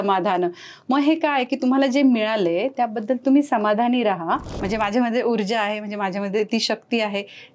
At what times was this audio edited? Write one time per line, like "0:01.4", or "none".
0:04.5

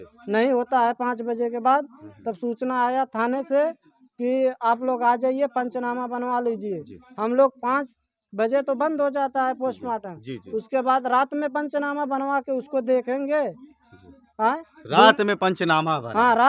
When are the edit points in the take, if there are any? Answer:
none

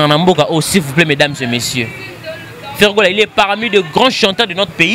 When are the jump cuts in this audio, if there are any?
none

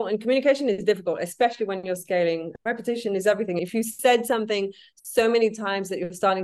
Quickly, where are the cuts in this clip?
0:02.5
0:03.6

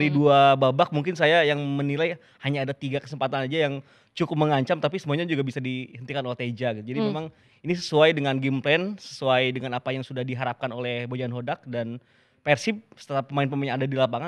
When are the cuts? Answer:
none

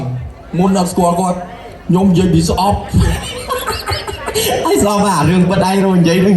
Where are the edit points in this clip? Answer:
none

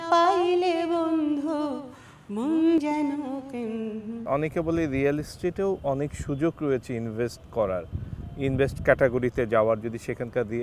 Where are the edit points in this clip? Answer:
0:04.2

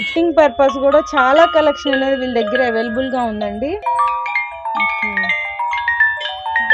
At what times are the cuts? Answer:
0:03.8

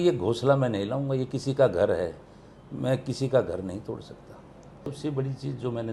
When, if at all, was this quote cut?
0:04.9

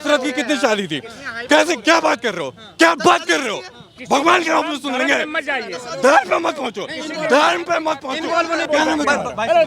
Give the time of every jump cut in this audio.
0:08.7

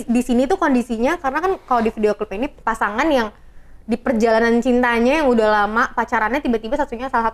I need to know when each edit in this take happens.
0:02.6

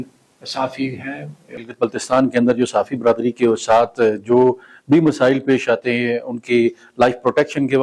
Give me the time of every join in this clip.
0:01.6

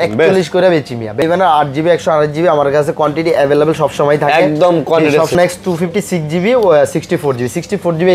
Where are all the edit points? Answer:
0:01.2
0:05.3

